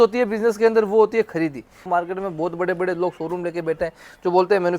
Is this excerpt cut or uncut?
cut